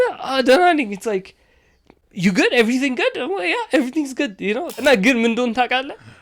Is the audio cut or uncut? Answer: cut